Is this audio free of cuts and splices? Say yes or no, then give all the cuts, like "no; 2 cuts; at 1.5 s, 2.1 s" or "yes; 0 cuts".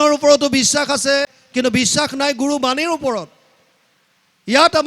no; 1 cut; at 1.4 s